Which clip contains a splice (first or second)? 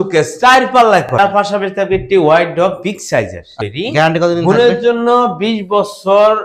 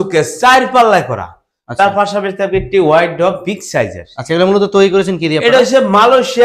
first